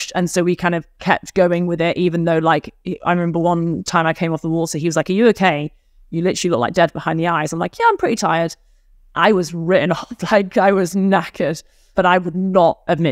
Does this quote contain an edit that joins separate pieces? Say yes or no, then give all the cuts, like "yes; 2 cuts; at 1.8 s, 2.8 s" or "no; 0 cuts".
yes; 1 cut; at 11.8 s